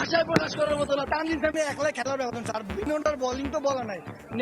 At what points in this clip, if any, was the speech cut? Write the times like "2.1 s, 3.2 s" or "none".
1.0 s